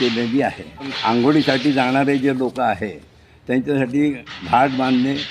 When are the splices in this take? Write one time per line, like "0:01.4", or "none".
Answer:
0:00.9